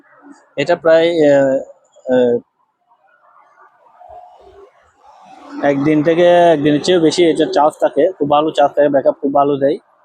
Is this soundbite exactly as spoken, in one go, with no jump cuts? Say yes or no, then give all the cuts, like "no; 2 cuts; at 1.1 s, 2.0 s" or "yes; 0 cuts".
yes; 0 cuts